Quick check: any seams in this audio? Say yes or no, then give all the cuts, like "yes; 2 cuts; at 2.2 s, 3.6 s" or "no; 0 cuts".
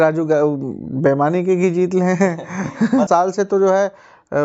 yes; 1 cut; at 3.1 s